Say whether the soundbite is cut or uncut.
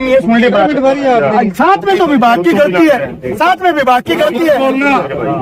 uncut